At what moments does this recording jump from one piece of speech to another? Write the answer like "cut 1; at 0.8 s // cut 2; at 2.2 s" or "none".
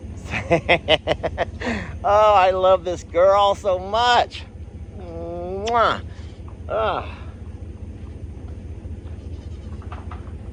none

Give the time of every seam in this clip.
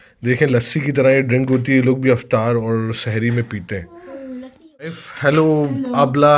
cut 1; at 5.1 s

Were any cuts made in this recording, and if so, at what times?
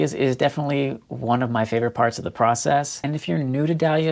cut 1; at 2.9 s

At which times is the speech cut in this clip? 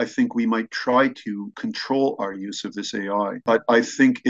cut 1; at 1.5 s // cut 2; at 3.4 s

